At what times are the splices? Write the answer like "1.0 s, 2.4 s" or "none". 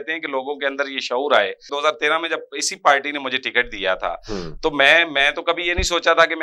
1.7 s